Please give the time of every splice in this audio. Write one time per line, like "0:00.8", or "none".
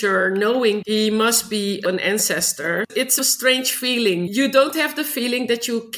0:00.8
0:01.8
0:03.1
0:04.3

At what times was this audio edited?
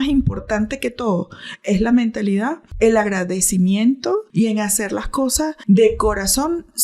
0:02.6
0:04.3
0:05.6

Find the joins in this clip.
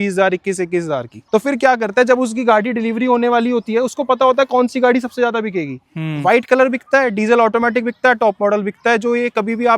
none

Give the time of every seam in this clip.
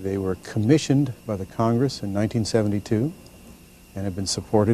0:03.2

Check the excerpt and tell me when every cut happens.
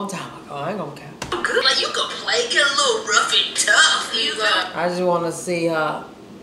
0:01.6

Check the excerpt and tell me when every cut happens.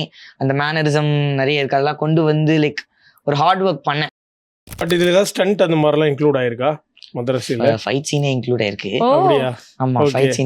0:04.3

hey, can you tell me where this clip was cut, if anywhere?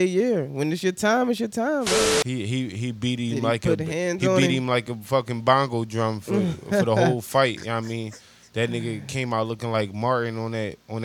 0:02.2

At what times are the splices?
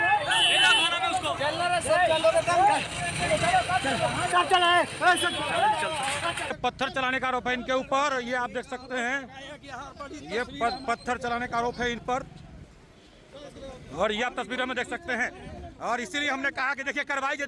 0:06.5

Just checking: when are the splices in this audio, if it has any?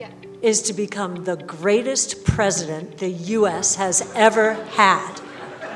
none

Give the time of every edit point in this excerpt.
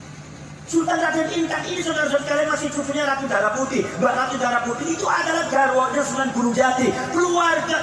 none

